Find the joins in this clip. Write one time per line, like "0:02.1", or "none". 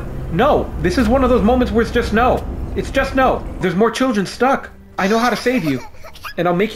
0:03.6
0:04.8